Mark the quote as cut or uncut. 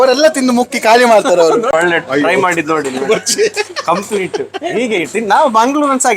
cut